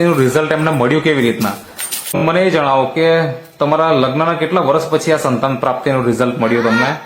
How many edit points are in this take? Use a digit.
1